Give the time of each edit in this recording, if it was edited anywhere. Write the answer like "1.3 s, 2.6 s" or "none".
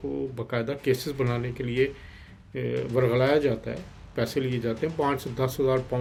none